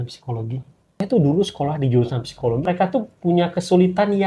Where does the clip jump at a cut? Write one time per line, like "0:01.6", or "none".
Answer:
0:01.0
0:02.6